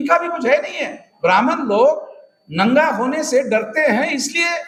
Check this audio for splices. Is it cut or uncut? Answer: uncut